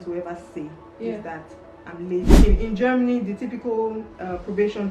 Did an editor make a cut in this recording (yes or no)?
yes